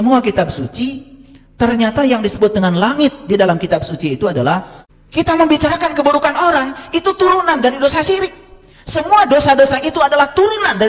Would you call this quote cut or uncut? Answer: cut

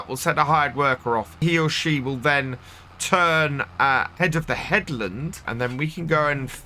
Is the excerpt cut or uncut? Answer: cut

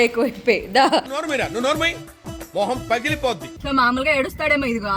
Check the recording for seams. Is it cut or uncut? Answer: cut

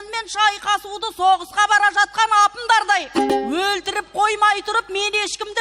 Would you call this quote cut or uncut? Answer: cut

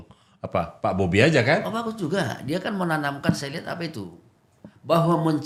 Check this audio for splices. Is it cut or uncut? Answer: uncut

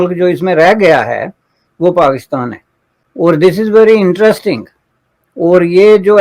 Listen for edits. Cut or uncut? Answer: uncut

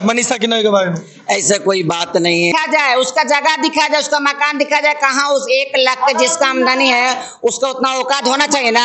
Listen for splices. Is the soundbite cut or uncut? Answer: cut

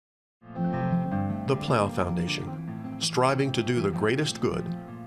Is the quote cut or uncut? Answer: uncut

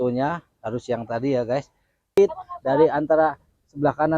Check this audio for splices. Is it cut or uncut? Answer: cut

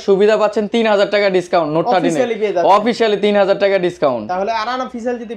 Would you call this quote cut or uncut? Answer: uncut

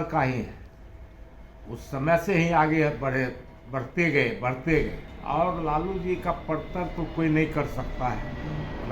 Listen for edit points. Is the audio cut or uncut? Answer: cut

